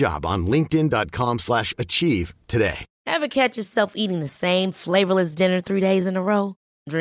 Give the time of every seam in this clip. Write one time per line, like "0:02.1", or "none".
0:02.9